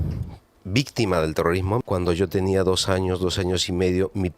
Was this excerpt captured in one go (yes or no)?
no